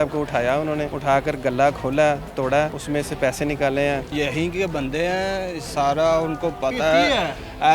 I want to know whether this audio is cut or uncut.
cut